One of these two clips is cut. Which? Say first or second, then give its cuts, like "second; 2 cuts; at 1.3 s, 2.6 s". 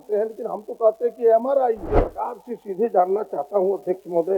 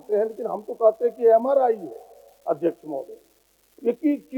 first; 1 cut; at 2.0 s